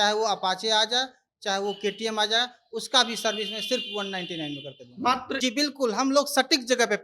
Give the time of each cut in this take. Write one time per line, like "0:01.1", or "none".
0:05.3